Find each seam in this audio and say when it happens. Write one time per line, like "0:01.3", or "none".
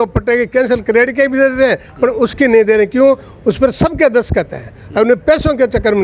none